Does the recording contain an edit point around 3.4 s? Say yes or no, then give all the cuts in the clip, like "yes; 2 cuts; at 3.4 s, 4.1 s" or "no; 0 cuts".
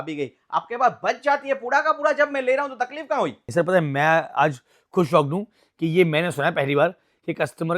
yes; 1 cut; at 3.4 s